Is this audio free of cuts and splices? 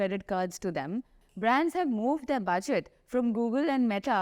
no; 1 cut; at 1.2 s

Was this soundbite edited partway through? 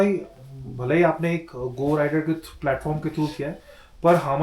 no; 0 cuts

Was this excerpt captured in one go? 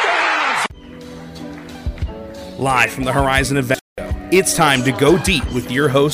no; 1 cut; at 3.9 s

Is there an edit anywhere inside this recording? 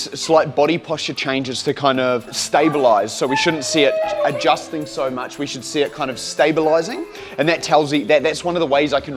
yes; 1 cut; at 2.3 s

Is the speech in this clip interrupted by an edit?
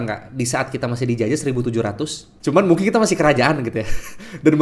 yes; 1 cut; at 2.2 s

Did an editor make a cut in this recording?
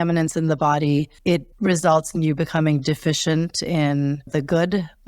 yes; 2 cuts; at 1.5 s, 4.2 s

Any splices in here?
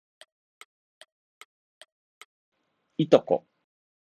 no; 0 cuts

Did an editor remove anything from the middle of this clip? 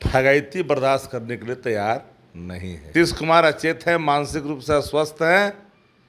yes; 1 cut; at 2.9 s

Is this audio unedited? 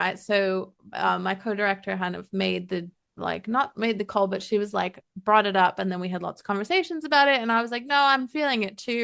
yes; 0 cuts

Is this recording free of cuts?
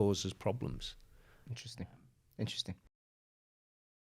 yes; 0 cuts

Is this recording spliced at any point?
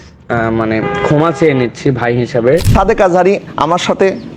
yes; 1 cut; at 2.7 s

